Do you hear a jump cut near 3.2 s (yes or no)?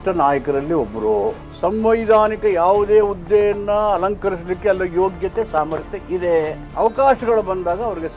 no